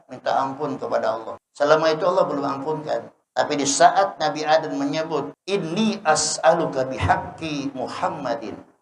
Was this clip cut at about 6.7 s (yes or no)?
no